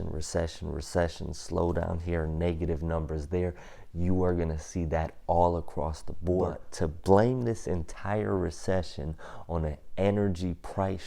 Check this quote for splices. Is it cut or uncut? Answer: cut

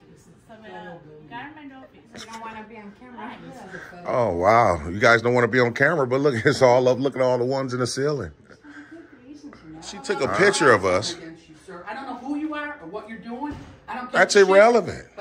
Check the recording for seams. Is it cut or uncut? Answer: cut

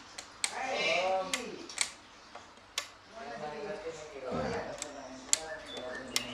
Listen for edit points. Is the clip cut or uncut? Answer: uncut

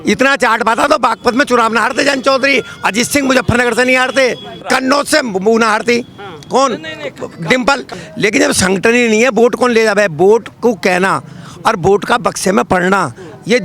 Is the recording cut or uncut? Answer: cut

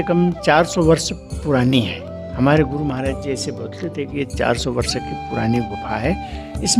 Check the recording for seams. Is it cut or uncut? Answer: uncut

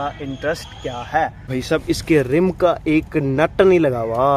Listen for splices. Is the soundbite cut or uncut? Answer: cut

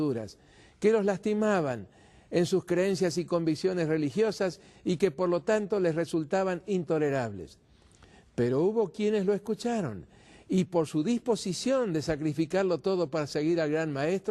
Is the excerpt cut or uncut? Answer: cut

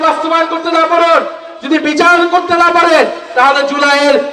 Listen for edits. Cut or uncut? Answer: uncut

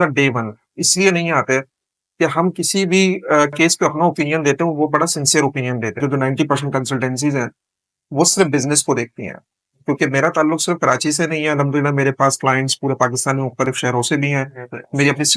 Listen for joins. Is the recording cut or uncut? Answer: cut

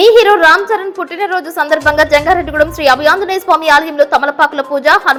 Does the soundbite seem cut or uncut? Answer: uncut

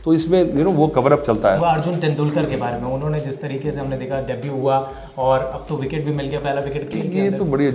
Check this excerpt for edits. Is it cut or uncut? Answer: cut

